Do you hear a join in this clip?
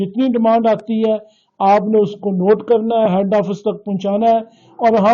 no; 0 cuts

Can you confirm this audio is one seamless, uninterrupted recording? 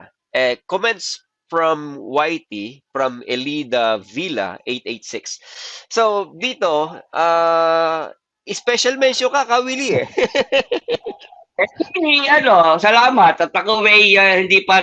yes; 0 cuts

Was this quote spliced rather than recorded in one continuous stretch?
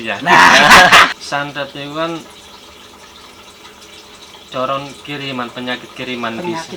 yes; 1 cut; at 1.2 s

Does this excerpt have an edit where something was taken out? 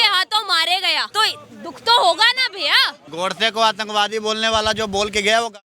yes; 2 cuts; at 1.1 s, 3.1 s

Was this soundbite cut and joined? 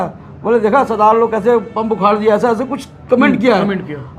no; 0 cuts

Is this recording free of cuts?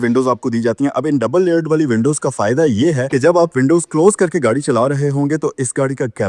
no; 1 cut; at 3.0 s

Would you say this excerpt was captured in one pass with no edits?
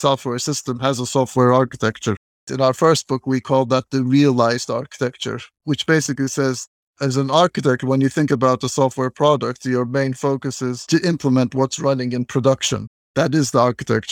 yes; 0 cuts

